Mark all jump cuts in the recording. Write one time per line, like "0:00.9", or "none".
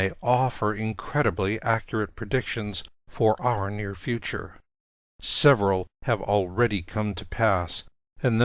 0:03.1